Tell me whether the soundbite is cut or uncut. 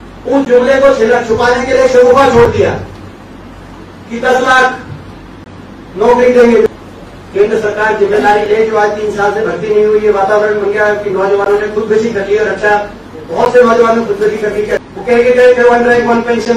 cut